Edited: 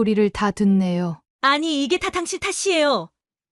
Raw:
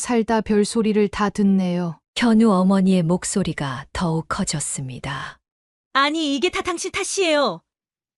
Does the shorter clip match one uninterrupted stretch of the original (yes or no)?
no